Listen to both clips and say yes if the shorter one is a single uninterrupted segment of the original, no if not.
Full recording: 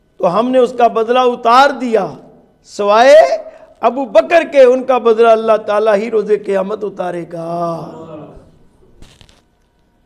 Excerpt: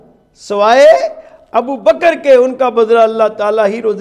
yes